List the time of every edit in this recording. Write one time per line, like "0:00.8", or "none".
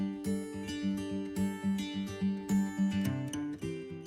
none